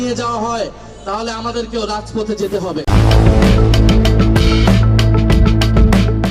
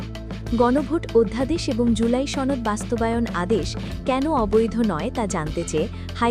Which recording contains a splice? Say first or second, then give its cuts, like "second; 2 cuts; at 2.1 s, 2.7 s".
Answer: first; 1 cut; at 2.9 s